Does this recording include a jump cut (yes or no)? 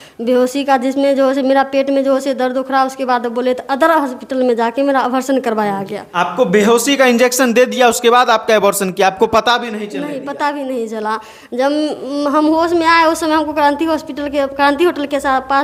no